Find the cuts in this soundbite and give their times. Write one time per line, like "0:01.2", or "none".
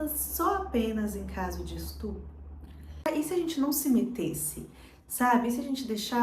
0:03.0